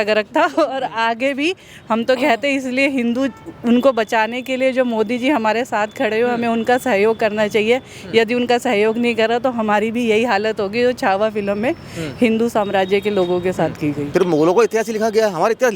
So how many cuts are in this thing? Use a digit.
1